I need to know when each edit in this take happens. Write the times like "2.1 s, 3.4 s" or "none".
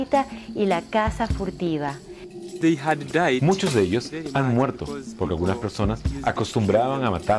none